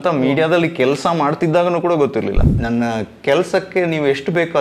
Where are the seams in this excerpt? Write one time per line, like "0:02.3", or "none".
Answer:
0:02.5

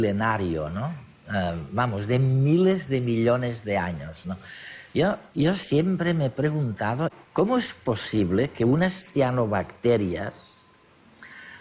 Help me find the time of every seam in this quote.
0:03.9

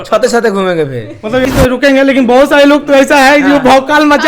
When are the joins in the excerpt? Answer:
0:01.5

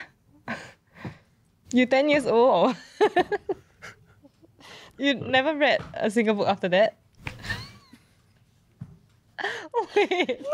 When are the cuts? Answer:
none

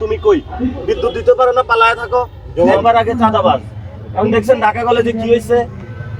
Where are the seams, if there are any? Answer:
0:02.8

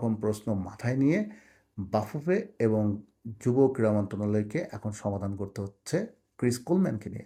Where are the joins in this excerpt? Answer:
none

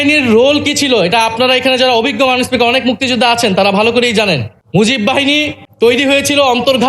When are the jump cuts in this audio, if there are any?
0:04.5
0:05.6

